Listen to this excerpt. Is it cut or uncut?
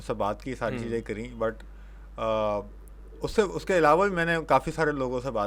uncut